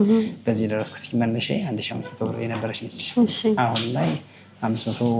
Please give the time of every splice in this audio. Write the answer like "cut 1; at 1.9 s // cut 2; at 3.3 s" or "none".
none